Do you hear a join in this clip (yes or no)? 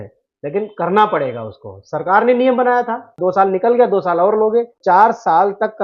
yes